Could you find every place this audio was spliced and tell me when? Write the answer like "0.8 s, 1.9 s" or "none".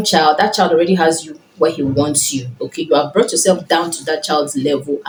none